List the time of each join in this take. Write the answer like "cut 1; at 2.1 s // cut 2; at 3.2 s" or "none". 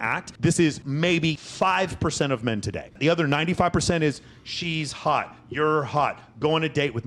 cut 1; at 1.2 s // cut 2; at 3.0 s